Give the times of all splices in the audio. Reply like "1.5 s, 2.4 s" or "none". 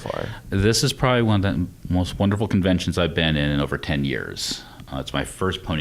3.4 s